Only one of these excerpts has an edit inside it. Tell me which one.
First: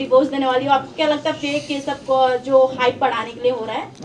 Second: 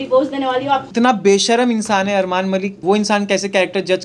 second; 2 cuts; at 0.9 s, 2.8 s

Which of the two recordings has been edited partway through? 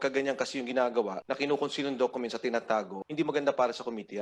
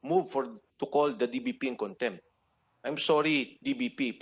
first; 2 cuts; at 1.2 s, 3.0 s

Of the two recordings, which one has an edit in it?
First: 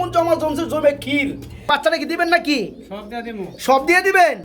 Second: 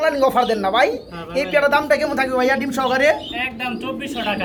first; 1 cut; at 1.7 s

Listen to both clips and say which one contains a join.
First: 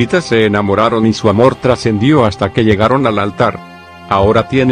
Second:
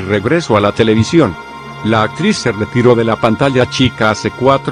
second; 1 cut; at 1.4 s

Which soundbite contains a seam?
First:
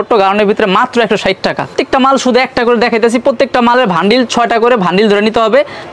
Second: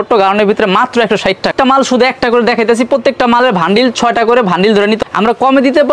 second; 2 cuts; at 1.5 s, 5.0 s

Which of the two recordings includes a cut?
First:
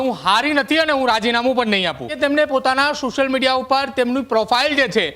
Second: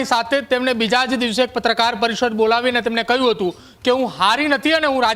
first; 1 cut; at 2.1 s

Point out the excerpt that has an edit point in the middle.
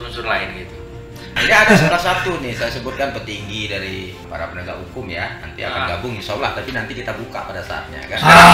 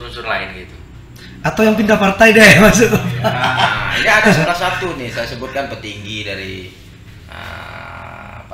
first; 2 cuts; at 1.3 s, 4.2 s

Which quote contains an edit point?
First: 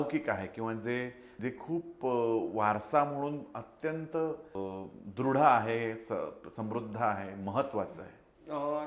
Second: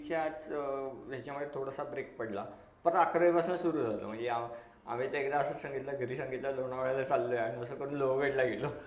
first; 2 cuts; at 1.2 s, 4.5 s

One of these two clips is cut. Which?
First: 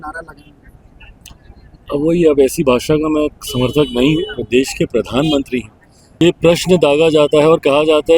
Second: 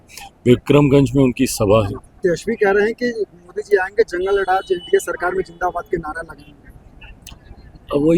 first; 1 cut; at 6.2 s

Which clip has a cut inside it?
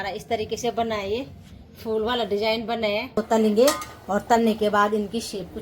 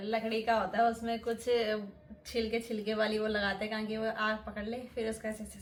first; 1 cut; at 3.1 s

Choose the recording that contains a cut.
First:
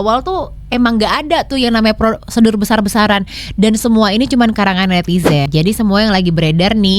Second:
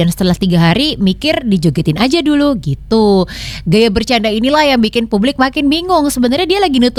first; 1 cut; at 5.5 s

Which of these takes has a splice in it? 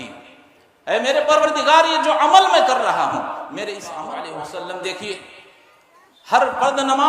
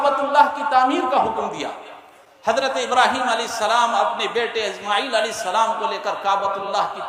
first; 1 cut; at 4.0 s

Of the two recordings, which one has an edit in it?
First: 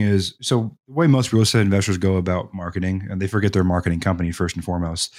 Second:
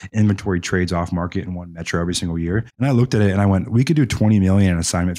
second; 1 cut; at 2.7 s

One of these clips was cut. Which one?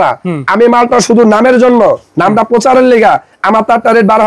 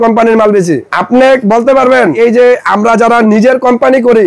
second; 2 cuts; at 0.9 s, 2.1 s

